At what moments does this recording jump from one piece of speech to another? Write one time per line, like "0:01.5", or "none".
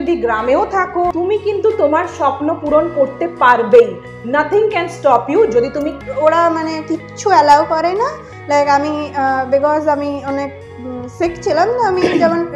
0:01.1
0:05.9